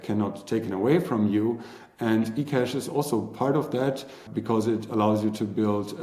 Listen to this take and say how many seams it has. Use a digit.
1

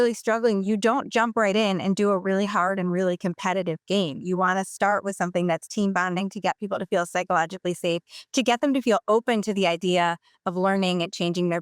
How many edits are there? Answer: 0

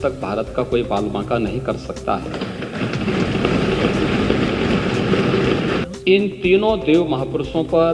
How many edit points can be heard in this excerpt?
1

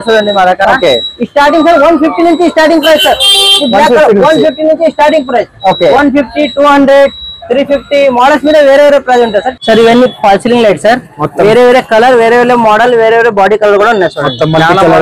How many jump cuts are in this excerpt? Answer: 1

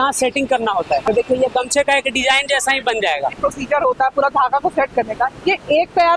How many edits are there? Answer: 2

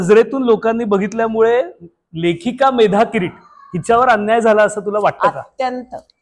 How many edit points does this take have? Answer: 0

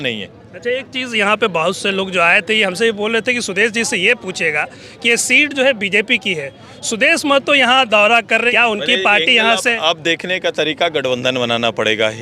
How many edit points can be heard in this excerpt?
1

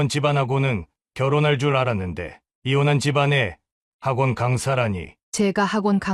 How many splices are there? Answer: 1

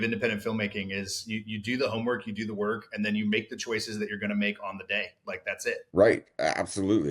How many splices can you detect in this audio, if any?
1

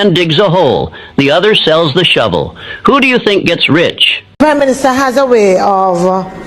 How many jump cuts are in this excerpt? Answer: 1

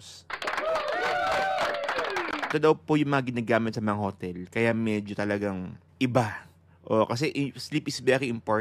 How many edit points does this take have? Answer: 2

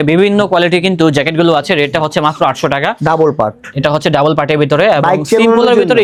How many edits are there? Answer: 0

